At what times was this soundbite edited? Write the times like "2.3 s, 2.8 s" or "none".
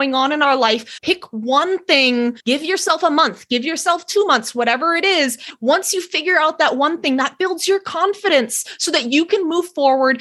5.5 s